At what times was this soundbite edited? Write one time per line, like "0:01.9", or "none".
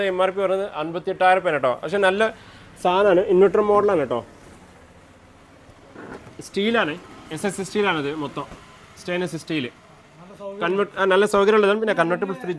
none